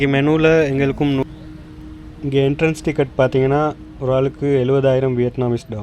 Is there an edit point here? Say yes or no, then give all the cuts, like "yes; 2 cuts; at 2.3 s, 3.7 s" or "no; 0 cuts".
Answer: yes; 1 cut; at 1.2 s